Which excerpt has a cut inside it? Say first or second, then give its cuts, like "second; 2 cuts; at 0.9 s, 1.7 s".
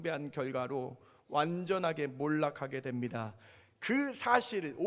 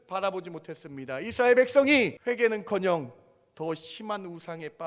second; 1 cut; at 2.2 s